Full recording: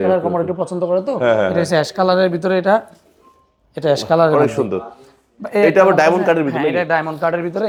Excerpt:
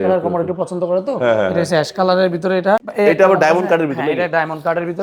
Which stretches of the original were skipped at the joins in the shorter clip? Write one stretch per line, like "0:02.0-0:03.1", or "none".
0:02.9-0:05.4